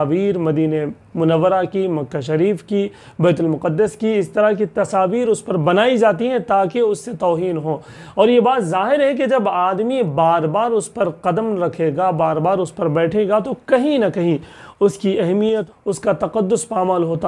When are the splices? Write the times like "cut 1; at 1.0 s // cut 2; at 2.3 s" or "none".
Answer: cut 1; at 15.6 s